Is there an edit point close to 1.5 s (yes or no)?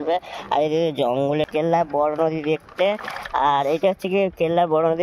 yes